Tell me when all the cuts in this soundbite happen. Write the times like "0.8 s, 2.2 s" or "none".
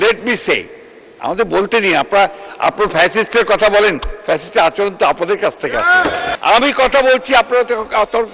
6.3 s